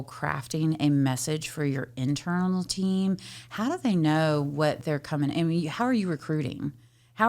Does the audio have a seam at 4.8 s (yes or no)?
yes